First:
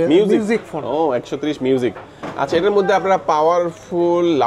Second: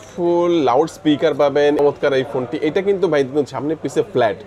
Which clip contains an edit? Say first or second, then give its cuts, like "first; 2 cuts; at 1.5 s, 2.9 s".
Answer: second; 1 cut; at 1.8 s